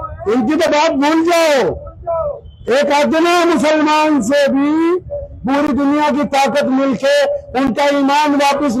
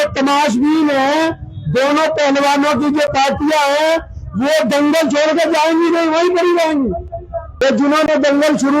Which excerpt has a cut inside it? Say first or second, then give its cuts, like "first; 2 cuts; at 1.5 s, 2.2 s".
second; 1 cut; at 7.4 s